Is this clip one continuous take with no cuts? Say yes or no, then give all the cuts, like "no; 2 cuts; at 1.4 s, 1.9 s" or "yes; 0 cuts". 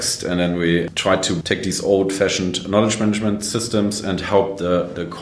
no; 1 cut; at 0.9 s